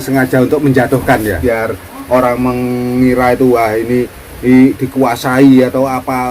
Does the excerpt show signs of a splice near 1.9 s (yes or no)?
yes